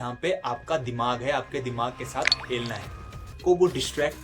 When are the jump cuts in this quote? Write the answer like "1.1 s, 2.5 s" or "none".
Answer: 3.2 s